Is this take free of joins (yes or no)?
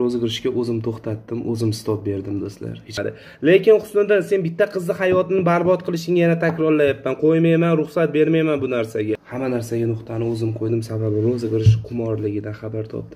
no